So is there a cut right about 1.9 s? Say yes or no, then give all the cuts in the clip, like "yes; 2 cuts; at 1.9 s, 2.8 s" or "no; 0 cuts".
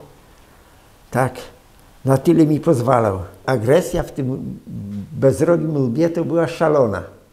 no; 1 cut; at 3.4 s